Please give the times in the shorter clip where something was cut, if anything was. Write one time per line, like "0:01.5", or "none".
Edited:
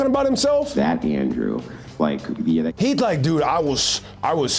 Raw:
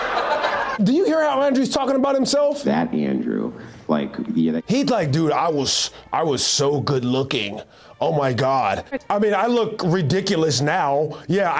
none